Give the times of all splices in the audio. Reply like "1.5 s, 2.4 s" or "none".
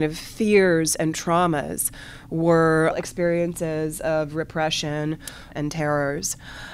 3.0 s, 5.5 s